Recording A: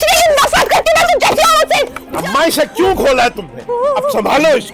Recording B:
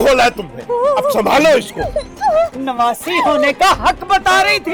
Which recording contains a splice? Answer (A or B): A